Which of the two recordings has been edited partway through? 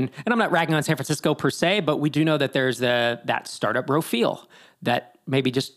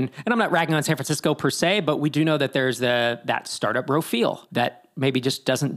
second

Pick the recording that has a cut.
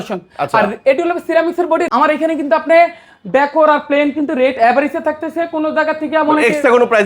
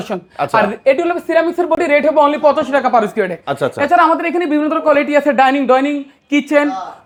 first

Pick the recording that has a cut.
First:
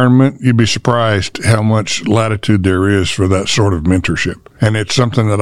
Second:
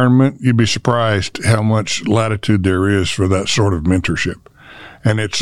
first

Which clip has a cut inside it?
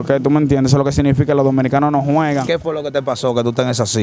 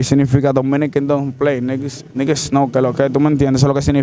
first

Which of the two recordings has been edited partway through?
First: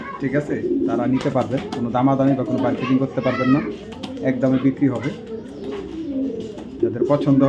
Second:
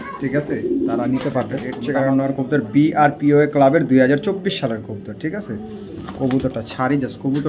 second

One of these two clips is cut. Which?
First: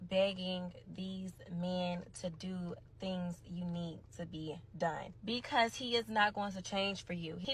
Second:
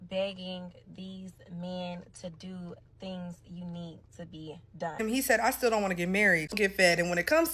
second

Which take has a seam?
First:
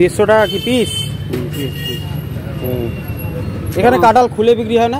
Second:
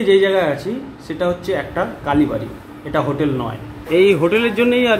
second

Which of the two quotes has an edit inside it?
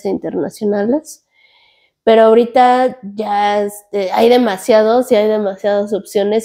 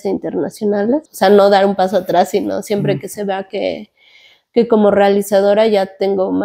second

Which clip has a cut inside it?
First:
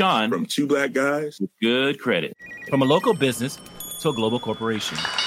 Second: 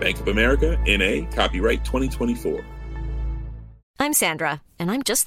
second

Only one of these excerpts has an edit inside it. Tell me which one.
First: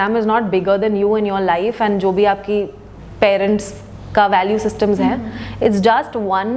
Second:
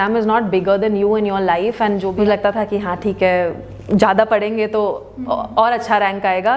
second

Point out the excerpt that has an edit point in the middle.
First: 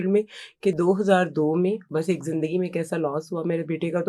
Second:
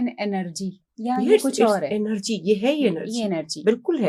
first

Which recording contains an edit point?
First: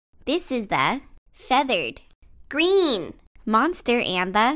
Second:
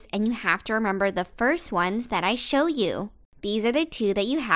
first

